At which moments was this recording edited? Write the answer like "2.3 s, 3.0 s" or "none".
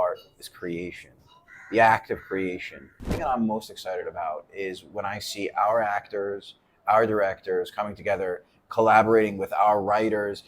3.0 s